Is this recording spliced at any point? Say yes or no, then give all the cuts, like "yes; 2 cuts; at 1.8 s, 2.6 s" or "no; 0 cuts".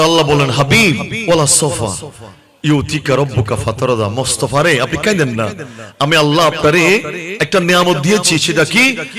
yes; 1 cut; at 1.2 s